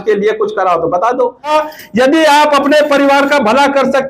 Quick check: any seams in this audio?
yes; 1 cut; at 1.5 s

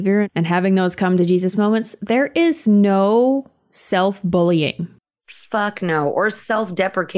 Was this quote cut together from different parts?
yes; 1 cut; at 4.9 s

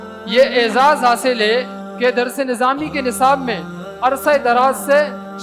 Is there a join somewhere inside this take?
no; 0 cuts

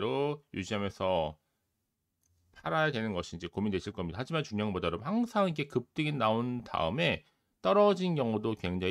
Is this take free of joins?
yes; 0 cuts

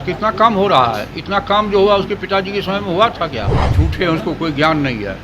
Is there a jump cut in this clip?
yes; 1 cut; at 3.7 s

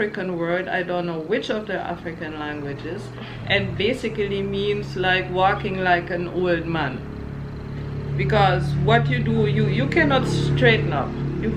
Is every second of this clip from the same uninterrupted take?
yes; 0 cuts

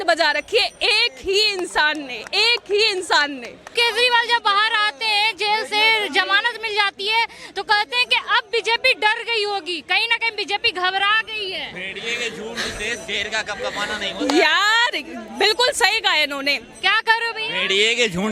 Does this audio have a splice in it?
no; 0 cuts

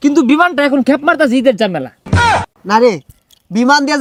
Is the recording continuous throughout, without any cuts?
yes; 0 cuts

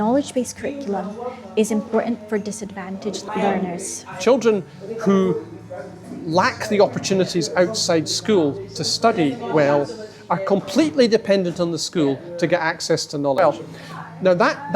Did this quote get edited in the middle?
yes; 3 cuts; at 3.2 s, 4.1 s, 13.4 s

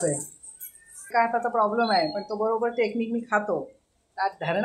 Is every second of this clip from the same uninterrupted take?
no; 1 cut; at 1.1 s

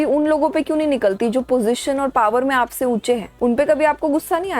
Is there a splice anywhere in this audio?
yes; 1 cut; at 3.3 s

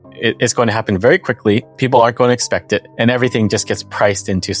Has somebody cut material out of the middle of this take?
yes; 1 cut; at 2.9 s

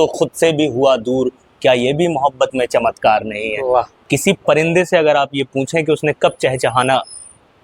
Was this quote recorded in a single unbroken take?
no; 1 cut; at 4.0 s

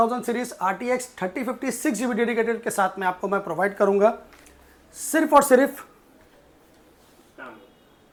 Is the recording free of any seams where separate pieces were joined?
yes; 0 cuts

